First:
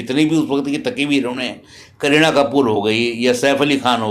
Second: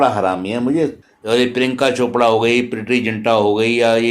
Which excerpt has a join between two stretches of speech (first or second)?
second